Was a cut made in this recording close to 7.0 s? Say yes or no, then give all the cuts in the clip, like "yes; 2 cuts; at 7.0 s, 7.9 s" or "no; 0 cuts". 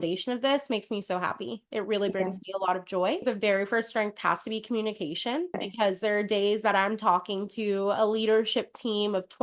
no; 2 cuts; at 3.2 s, 5.6 s